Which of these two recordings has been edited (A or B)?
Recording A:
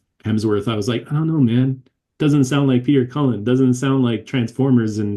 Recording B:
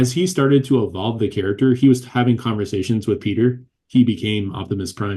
B